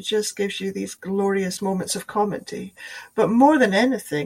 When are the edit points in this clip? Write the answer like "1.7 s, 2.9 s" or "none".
1.6 s